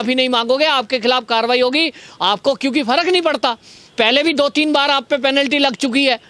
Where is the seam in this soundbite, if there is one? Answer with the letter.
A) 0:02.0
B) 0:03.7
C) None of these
C